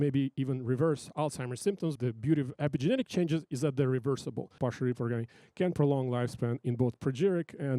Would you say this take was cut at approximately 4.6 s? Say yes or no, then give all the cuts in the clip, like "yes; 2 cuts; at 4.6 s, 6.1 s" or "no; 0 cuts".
yes; 2 cuts; at 2.0 s, 4.6 s